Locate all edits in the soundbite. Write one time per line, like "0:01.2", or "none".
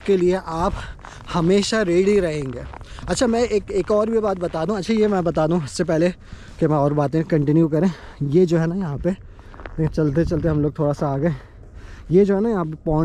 none

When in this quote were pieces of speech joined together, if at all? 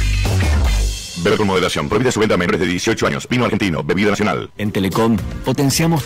0:04.5

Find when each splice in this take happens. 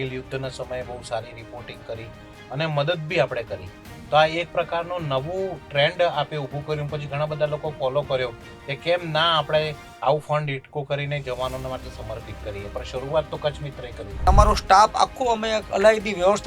0:14.3

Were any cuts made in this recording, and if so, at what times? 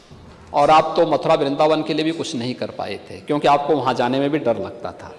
none

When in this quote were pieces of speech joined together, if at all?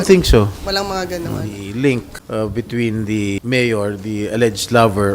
0:01.6
0:02.2
0:03.4

